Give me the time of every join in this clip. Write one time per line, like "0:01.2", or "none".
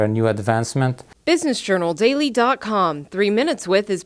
0:01.1